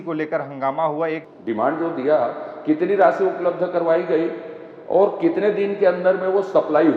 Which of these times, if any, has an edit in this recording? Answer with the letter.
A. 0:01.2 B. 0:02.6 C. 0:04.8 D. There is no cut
A